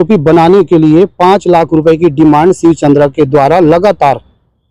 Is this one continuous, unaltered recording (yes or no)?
yes